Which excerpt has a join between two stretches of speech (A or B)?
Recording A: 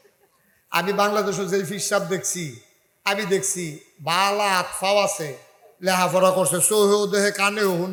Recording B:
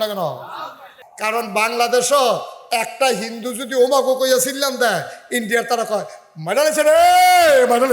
B